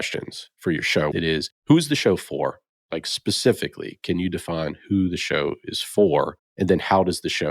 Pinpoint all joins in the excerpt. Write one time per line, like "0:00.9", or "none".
0:01.1